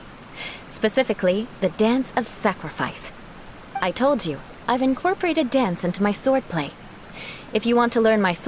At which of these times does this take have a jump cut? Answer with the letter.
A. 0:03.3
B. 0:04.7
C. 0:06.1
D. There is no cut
D